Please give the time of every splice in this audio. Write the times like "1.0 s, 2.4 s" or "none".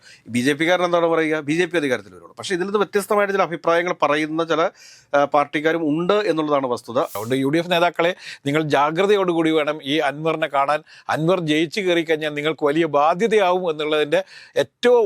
7.1 s